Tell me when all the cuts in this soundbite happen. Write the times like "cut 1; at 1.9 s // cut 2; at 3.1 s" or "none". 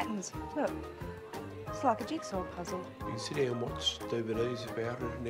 cut 1; at 2.9 s

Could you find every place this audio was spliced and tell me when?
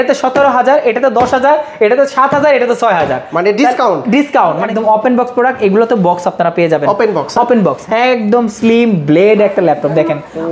cut 1; at 4.6 s // cut 2; at 7.8 s

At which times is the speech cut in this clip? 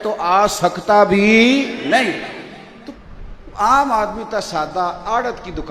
cut 1; at 3.0 s

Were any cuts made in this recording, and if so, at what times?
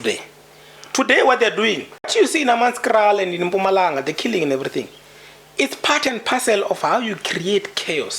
cut 1; at 2.1 s

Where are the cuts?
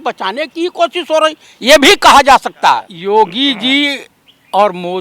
cut 1; at 2.9 s

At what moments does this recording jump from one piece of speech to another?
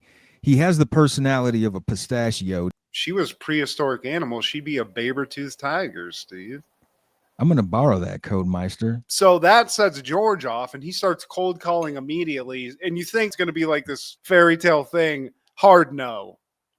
cut 1; at 2.7 s // cut 2; at 9.0 s

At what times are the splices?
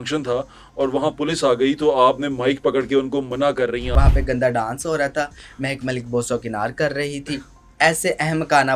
cut 1; at 3.9 s

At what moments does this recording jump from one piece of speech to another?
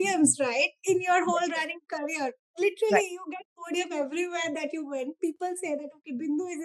none

